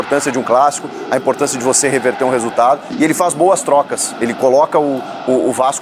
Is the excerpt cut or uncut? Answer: uncut